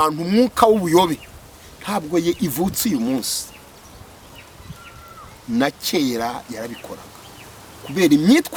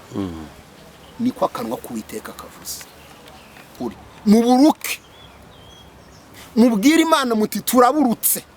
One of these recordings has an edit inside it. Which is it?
second; 1 cut; at 3.7 s

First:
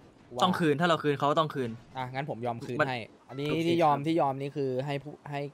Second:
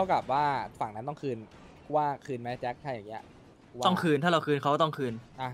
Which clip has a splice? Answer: first; 1 cut; at 3.1 s

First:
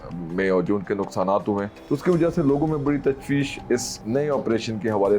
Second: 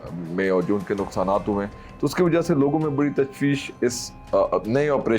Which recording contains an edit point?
first; 2 cuts; at 1.7 s, 4.0 s

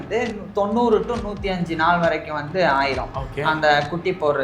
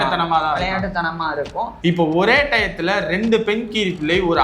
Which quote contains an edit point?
second; 1 cut; at 1.7 s

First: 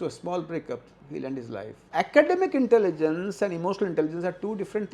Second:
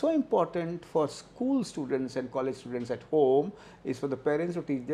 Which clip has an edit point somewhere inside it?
first; 1 cut; at 1.8 s

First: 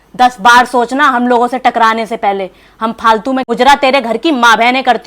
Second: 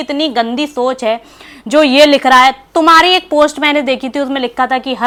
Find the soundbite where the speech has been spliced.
first; 1 cut; at 3.4 s

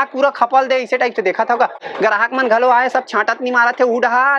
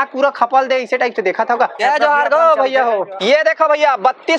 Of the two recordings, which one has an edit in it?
second; 2 cuts; at 1.8 s, 3.2 s

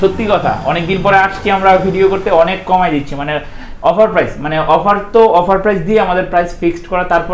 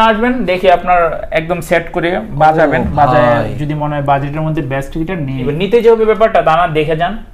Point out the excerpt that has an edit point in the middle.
second; 1 cut; at 5.4 s

